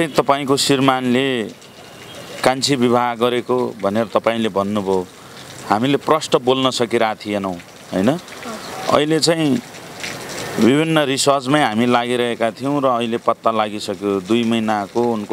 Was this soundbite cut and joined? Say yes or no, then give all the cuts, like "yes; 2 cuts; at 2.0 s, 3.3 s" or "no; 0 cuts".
no; 0 cuts